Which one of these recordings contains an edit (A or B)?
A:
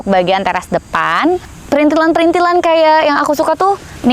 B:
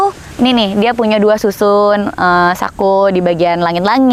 A